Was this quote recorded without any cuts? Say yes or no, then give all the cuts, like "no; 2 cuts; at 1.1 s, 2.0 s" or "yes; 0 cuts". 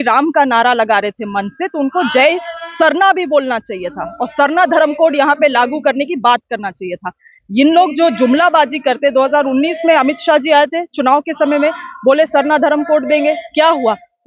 yes; 0 cuts